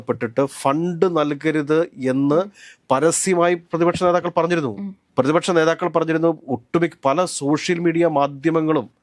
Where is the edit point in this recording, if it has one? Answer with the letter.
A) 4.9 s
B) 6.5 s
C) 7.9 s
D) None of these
D